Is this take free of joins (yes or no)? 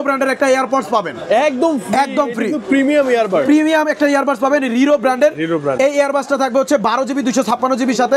yes